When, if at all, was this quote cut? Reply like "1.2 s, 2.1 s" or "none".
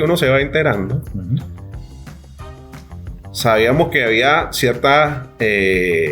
1.4 s, 3.0 s